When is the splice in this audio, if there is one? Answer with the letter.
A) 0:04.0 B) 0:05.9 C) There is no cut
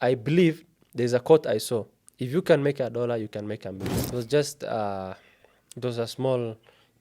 A